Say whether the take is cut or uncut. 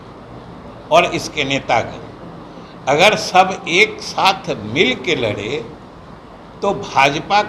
uncut